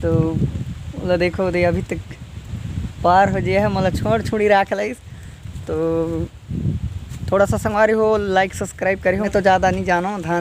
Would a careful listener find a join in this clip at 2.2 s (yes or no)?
no